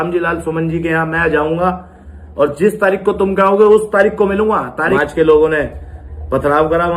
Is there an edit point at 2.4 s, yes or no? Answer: no